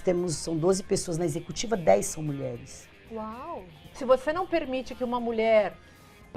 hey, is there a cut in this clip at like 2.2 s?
no; 1 cut; at 3.8 s

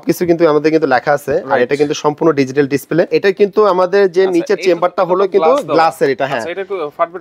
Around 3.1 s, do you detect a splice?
yes; 1 cut; at 3.1 s

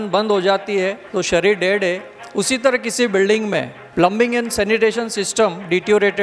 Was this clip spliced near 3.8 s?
no; 0 cuts

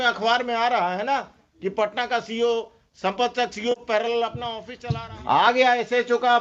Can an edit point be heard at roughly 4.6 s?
yes; 1 cut; at 4.6 s

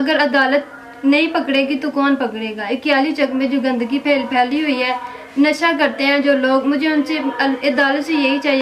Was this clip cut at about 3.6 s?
no; 0 cuts

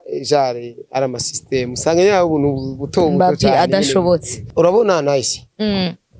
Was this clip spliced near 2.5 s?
no; 1 cut; at 4.4 s

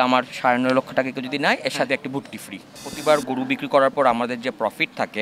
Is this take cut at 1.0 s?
no; 1 cut; at 2.9 s

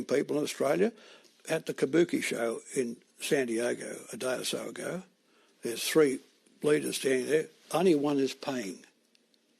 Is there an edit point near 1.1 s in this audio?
yes; 1 cut; at 1.1 s

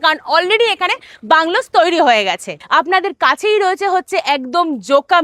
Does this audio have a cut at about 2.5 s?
yes; 1 cut; at 2.5 s

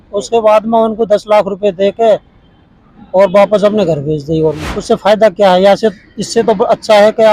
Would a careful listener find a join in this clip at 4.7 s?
yes; 1 cut; at 4.7 s

